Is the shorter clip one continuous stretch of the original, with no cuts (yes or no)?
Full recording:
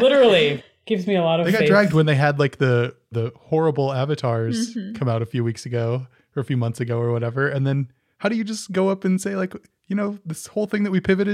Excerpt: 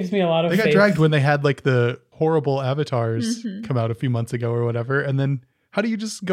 no